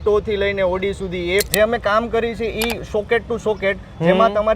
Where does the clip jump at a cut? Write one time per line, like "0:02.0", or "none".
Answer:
0:01.5

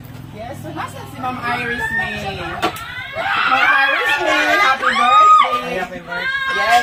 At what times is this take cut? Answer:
none

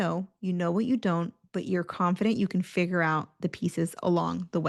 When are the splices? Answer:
none

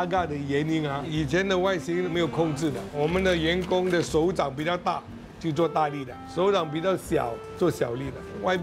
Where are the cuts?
none

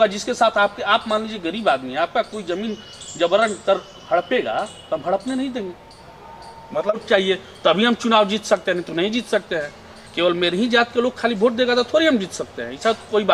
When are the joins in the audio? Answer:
0:07.0

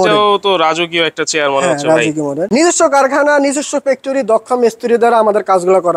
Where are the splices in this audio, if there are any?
0:02.5

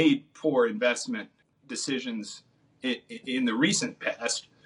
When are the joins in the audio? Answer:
0:01.6

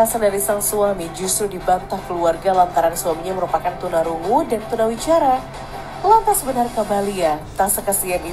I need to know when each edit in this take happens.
none

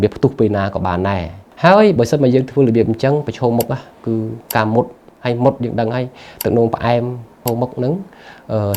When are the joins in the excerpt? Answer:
0:01.4
0:07.4

